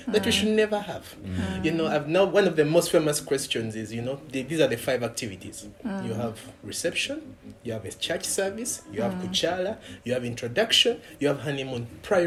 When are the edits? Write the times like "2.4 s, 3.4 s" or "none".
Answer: none